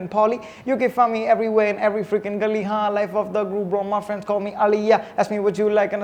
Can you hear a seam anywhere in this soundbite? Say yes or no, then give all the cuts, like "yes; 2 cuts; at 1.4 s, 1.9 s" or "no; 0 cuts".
no; 0 cuts